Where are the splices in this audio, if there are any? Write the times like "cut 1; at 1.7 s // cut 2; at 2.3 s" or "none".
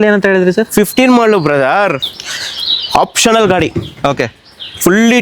none